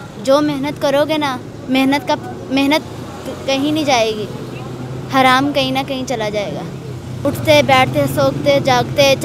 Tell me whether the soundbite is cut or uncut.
cut